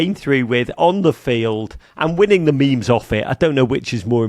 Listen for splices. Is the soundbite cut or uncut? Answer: uncut